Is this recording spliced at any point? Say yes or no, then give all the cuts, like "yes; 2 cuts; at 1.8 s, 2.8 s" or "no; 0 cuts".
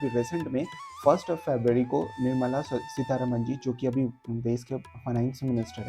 no; 0 cuts